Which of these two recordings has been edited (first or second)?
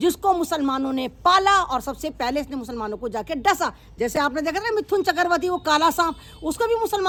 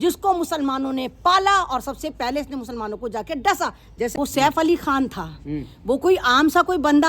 second